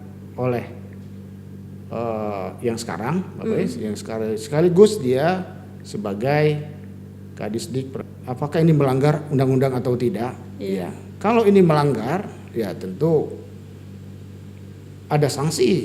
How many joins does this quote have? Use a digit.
1